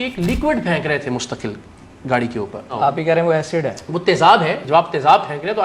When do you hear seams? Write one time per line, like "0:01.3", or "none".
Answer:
0:02.7
0:04.6